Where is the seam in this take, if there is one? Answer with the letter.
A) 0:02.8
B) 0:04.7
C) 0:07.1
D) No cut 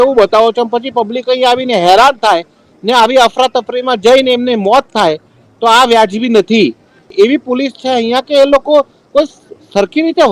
C